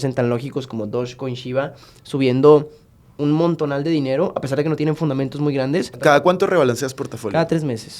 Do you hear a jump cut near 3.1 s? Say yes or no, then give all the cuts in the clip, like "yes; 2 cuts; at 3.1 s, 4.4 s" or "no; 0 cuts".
no; 1 cut; at 6.0 s